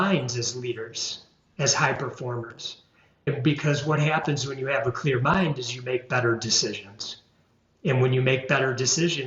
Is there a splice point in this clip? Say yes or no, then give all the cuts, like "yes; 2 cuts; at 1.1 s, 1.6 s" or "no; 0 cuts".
no; 0 cuts